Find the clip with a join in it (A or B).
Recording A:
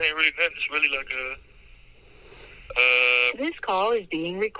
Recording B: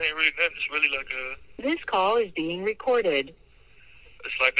B